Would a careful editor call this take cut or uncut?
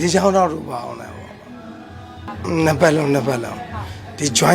cut